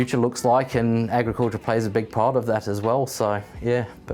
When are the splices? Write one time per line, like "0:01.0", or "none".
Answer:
none